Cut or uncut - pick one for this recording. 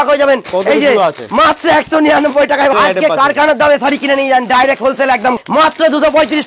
cut